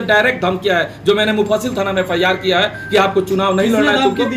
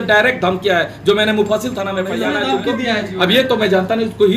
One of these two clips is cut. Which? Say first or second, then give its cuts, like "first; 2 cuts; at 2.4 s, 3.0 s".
second; 1 cut; at 2.1 s